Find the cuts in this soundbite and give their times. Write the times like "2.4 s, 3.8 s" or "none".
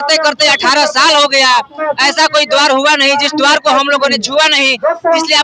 none